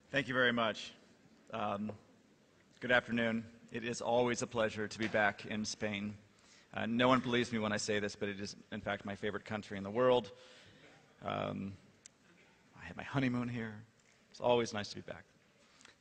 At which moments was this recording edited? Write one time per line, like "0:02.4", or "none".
none